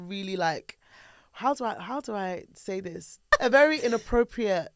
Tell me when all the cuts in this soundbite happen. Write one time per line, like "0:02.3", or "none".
0:03.4